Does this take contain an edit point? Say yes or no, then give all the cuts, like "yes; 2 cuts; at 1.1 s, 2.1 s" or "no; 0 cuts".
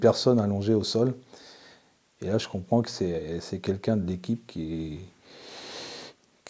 no; 0 cuts